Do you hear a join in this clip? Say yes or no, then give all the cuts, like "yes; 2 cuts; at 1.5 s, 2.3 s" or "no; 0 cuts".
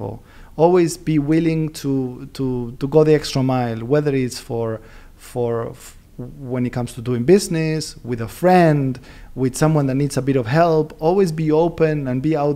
no; 0 cuts